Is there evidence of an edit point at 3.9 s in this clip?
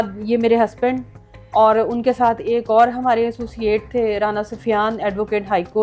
no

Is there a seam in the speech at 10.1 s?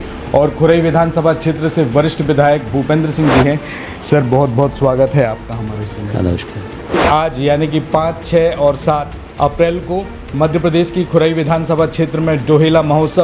no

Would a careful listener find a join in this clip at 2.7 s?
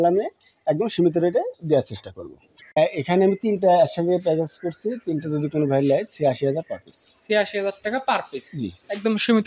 yes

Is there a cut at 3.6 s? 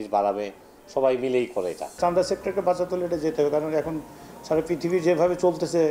no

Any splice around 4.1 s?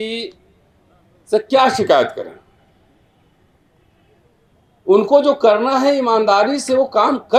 no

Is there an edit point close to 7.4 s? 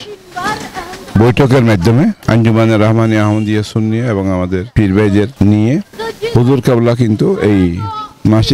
no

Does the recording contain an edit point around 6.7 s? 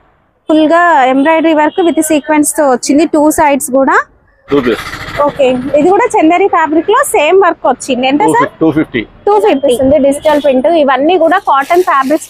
no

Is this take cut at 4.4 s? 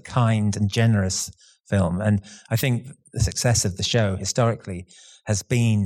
no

